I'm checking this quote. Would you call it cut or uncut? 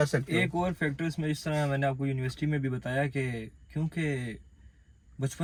uncut